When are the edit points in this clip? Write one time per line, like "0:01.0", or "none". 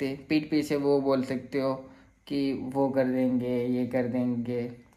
none